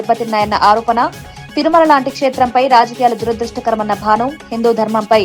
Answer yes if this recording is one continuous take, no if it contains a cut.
yes